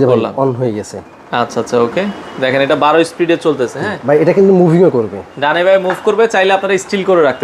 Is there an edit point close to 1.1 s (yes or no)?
no